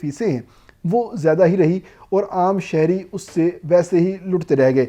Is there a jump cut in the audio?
no; 0 cuts

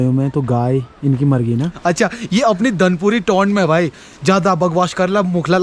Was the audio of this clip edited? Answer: yes; 1 cut; at 1.7 s

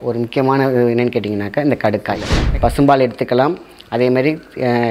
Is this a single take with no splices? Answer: no; 1 cut; at 2.4 s

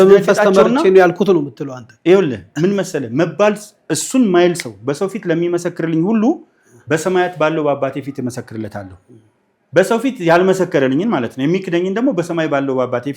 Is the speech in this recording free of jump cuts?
yes; 0 cuts

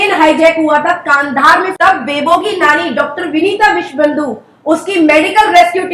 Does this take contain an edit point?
yes; 1 cut; at 1.7 s

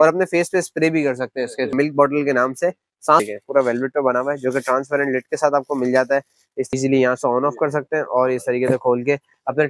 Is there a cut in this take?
yes; 3 cuts; at 1.7 s, 3.2 s, 6.7 s

